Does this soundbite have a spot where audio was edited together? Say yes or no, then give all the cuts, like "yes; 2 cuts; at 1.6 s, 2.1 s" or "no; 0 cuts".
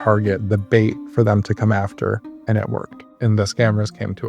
yes; 1 cut; at 3.0 s